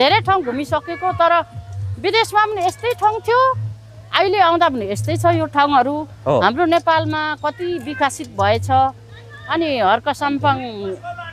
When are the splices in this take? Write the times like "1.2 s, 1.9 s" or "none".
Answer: none